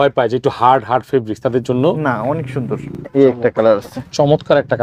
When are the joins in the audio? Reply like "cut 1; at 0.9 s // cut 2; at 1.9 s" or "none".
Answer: cut 1; at 3.0 s